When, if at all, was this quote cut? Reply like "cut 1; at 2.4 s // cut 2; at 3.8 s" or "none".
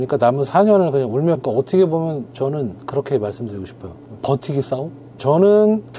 cut 1; at 1.4 s // cut 2; at 5.0 s

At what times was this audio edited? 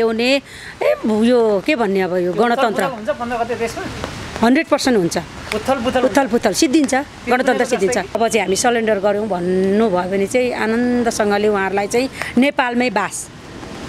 cut 1; at 8.2 s

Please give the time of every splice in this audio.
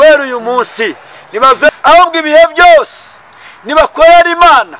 cut 1; at 1.7 s

